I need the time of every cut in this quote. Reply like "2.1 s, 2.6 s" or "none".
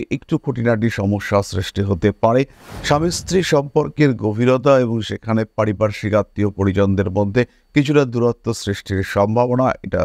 none